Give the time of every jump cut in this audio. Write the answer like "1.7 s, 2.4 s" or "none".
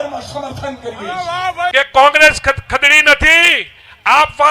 1.7 s